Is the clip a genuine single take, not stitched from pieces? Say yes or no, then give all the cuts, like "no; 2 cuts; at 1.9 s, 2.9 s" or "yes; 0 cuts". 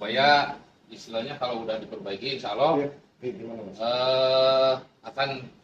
yes; 0 cuts